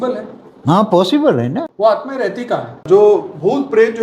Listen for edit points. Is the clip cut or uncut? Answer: cut